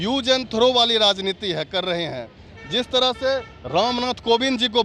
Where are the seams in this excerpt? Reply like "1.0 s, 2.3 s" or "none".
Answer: none